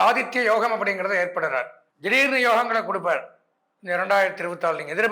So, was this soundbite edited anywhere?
yes; 1 cut; at 1.8 s

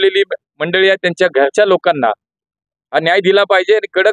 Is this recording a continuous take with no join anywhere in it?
yes; 0 cuts

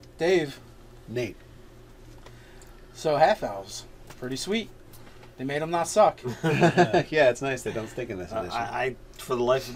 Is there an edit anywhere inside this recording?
no; 0 cuts

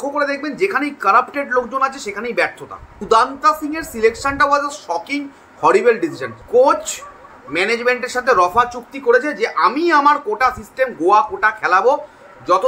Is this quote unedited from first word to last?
no; 2 cuts; at 3.0 s, 6.3 s

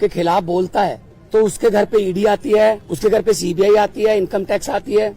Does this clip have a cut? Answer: yes; 2 cuts; at 1.1 s, 2.9 s

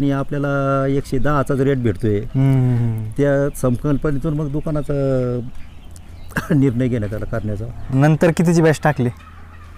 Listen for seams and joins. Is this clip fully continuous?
yes; 0 cuts

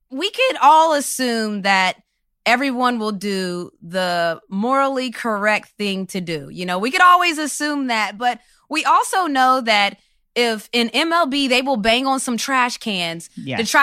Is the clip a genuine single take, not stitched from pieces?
yes; 0 cuts

